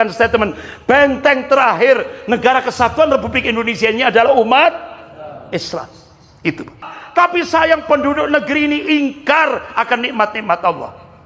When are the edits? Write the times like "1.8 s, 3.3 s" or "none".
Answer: 7.0 s